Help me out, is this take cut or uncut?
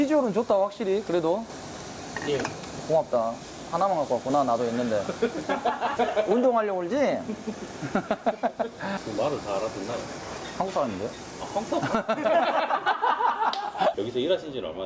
cut